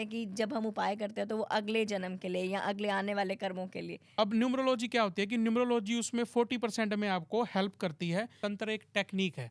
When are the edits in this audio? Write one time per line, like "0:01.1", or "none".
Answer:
0:04.0
0:08.4